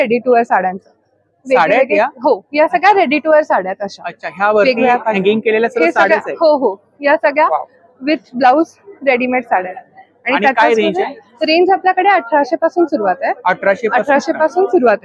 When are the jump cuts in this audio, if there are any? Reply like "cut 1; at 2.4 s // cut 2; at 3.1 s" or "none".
none